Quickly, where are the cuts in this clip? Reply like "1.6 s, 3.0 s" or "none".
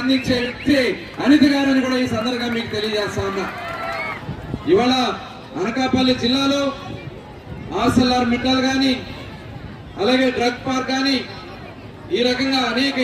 4.2 s